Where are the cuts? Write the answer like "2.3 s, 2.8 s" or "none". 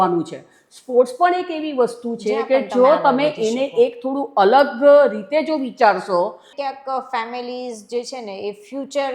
6.5 s